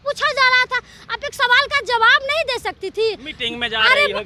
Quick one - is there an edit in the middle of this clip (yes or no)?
no